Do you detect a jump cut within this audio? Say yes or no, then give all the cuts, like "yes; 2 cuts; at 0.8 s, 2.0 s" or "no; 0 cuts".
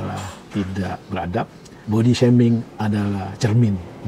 yes; 1 cut; at 1.7 s